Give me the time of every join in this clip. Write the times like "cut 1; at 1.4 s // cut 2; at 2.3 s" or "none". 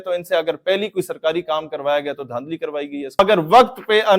cut 1; at 3.2 s